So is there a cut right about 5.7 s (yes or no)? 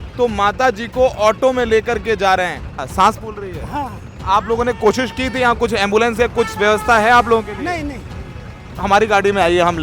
no